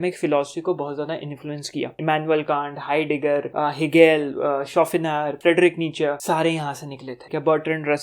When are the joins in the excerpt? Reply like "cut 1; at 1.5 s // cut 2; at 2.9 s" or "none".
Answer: cut 1; at 1.9 s // cut 2; at 3.5 s // cut 3; at 5.3 s // cut 4; at 6.2 s // cut 5; at 7.1 s